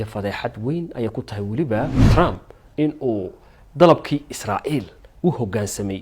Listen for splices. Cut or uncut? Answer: cut